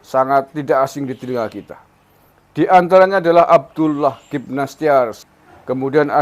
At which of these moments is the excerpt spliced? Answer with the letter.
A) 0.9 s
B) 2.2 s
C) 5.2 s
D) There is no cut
C